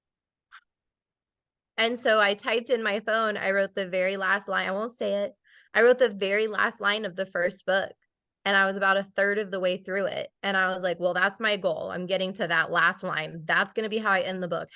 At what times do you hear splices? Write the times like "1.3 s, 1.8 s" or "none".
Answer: none